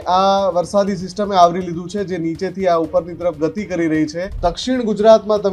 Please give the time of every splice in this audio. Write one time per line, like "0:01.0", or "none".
0:04.3